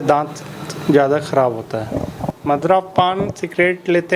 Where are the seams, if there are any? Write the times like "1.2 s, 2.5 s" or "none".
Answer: 2.2 s